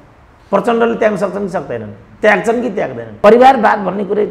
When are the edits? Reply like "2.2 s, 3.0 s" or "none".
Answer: 3.1 s